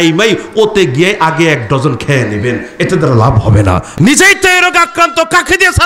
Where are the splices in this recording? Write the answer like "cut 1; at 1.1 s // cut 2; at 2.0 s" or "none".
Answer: cut 1; at 3.9 s